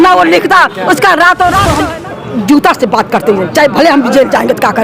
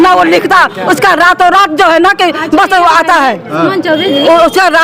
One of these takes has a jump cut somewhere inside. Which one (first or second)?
first